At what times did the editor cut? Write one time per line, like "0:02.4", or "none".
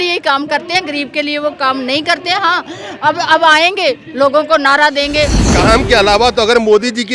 0:05.5